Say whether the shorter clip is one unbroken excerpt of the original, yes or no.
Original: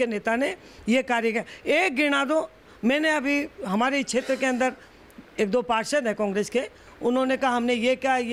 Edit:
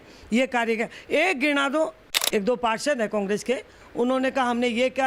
no